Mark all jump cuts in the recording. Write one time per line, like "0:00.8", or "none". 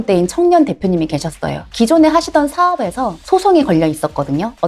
0:01.7